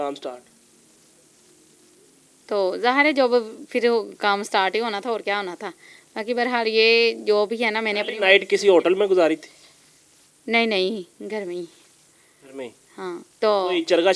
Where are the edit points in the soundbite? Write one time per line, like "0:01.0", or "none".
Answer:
none